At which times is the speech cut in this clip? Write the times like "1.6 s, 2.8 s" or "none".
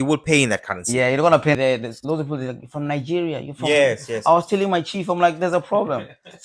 1.6 s